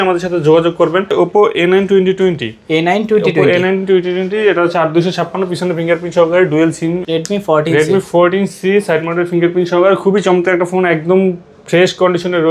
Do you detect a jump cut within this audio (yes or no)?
yes